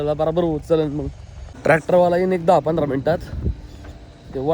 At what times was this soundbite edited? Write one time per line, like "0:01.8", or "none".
0:01.6